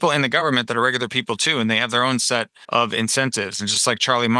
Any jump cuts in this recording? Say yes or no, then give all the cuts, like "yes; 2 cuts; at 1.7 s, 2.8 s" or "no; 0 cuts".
yes; 1 cut; at 2.6 s